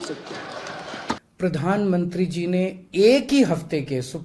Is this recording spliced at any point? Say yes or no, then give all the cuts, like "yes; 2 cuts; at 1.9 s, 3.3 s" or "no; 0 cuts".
yes; 1 cut; at 1.2 s